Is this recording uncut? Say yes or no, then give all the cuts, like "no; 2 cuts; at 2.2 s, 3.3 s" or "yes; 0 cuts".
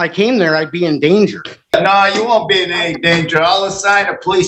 no; 1 cut; at 1.7 s